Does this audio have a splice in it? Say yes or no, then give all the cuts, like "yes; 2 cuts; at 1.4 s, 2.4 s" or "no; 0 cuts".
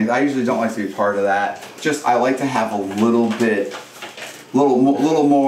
yes; 1 cut; at 1.8 s